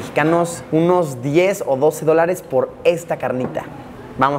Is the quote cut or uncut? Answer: uncut